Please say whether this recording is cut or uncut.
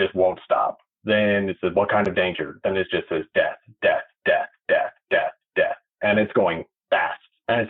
uncut